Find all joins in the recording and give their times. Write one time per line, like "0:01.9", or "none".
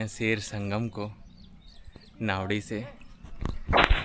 none